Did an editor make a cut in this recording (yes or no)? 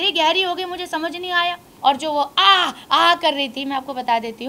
yes